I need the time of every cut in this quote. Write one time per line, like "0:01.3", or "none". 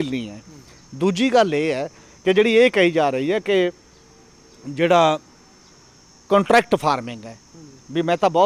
none